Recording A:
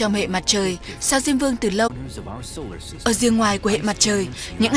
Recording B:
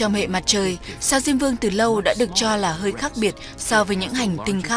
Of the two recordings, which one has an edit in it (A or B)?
B